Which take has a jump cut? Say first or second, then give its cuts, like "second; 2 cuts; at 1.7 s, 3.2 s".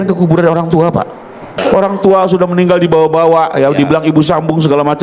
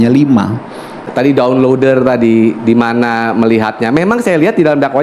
first; 1 cut; at 1.5 s